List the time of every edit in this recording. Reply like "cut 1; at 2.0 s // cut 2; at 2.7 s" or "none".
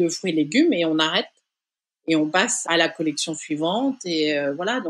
cut 1; at 2.6 s